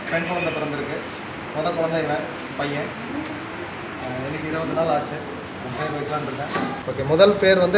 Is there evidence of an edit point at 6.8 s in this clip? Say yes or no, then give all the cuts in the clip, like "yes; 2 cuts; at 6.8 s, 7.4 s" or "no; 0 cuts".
yes; 1 cut; at 6.8 s